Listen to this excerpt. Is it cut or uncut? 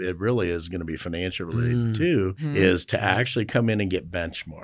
cut